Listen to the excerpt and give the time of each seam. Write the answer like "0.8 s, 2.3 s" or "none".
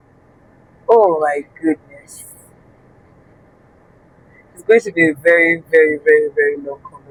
none